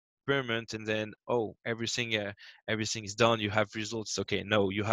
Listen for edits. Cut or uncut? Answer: uncut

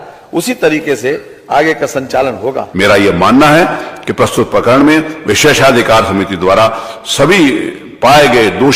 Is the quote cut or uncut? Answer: cut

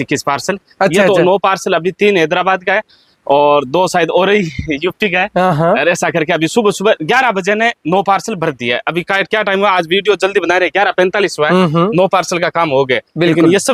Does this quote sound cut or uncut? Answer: uncut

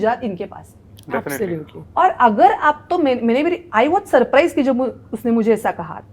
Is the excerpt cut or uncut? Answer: uncut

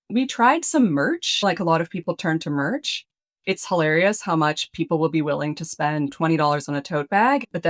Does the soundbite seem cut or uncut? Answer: uncut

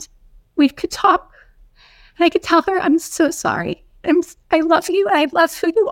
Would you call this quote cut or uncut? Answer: uncut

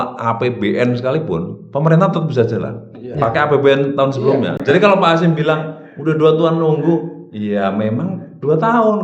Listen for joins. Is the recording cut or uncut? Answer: cut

